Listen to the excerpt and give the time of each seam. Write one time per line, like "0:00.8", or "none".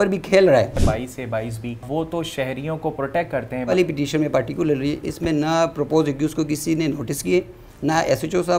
0:00.8
0:01.8
0:03.7